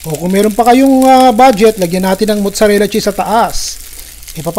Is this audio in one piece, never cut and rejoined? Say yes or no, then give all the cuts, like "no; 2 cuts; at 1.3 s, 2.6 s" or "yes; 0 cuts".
yes; 0 cuts